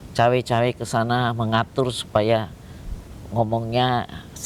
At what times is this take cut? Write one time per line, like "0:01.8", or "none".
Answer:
none